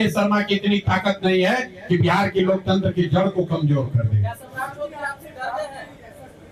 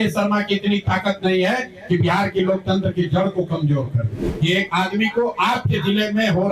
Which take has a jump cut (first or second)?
second